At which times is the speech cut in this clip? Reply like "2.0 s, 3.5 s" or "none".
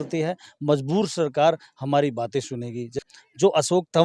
3.0 s